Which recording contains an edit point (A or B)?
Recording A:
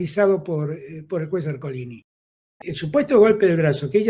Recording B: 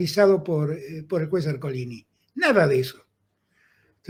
A